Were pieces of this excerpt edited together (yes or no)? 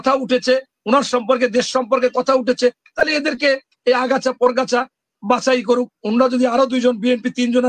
no